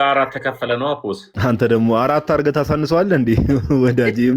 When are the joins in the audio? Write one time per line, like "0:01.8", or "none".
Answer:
0:01.3